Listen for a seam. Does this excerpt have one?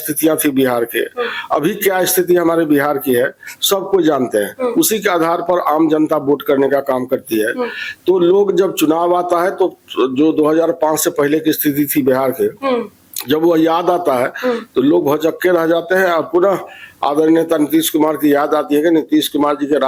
no; 0 cuts

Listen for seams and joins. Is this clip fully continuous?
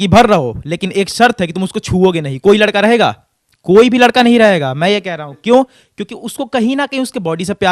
yes; 0 cuts

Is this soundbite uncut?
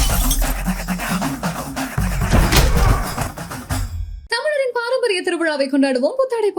yes; 0 cuts

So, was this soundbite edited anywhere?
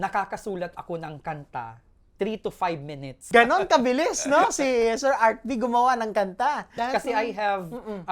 yes; 2 cuts; at 3.3 s, 6.7 s

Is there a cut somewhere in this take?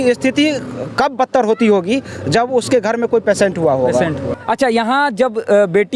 yes; 1 cut; at 4.3 s

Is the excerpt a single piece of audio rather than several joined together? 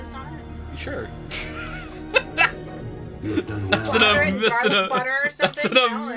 no; 1 cut; at 2.8 s

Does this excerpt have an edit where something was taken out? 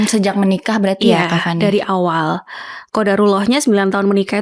no; 0 cuts

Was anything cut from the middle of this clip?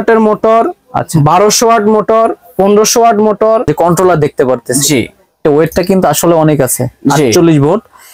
yes; 1 cut; at 3.7 s

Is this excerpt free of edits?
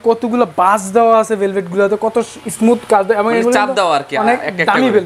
yes; 0 cuts

